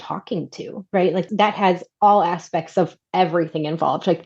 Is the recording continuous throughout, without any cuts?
no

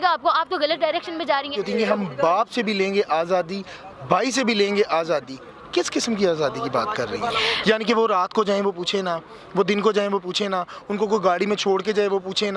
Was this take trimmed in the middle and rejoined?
yes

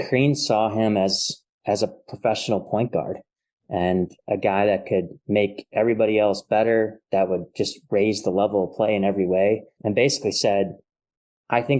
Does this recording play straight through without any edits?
no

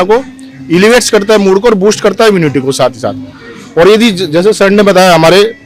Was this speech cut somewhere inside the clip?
no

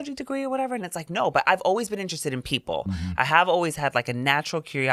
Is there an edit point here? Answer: no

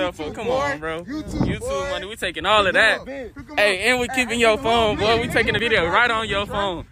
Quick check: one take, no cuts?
no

